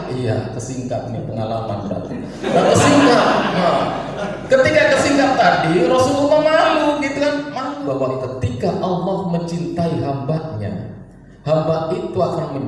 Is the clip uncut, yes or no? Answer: no